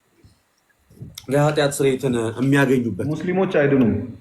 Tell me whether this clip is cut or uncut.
cut